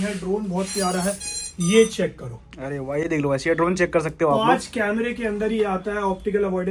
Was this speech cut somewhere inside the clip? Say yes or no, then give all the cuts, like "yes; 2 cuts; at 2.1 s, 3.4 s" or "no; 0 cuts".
no; 0 cuts